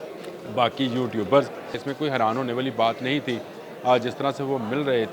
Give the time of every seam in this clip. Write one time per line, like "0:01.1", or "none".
0:01.8